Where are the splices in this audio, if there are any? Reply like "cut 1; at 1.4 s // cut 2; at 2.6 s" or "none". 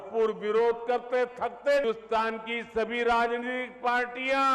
cut 1; at 1.8 s